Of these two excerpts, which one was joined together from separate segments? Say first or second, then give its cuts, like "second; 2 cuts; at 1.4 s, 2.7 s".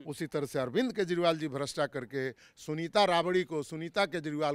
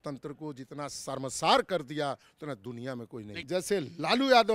second; 1 cut; at 3.5 s